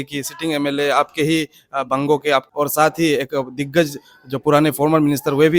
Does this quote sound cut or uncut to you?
cut